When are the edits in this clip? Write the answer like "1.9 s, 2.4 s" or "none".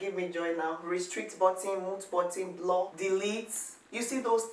none